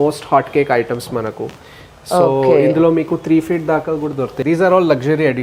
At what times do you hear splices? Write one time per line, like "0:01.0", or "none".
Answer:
0:04.3